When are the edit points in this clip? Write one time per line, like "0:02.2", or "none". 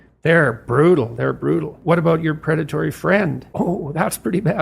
0:01.8
0:03.4